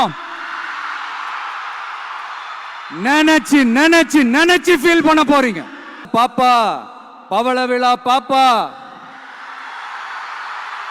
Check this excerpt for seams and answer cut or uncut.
cut